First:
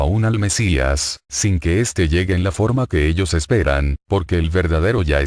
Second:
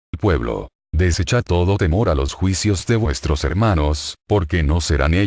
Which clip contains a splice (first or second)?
first